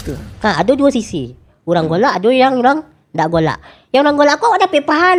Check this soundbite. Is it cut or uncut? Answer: uncut